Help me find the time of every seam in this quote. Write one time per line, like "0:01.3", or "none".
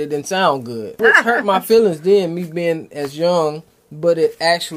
0:01.0